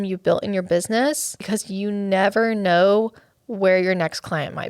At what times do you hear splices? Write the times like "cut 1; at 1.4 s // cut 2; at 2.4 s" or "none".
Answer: cut 1; at 1.4 s